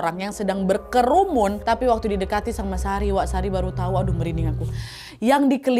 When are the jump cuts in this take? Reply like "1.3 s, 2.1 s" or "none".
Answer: 1.6 s